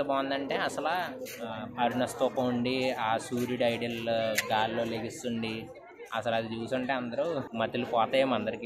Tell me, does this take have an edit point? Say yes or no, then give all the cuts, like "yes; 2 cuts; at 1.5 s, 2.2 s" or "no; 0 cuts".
yes; 1 cut; at 7.5 s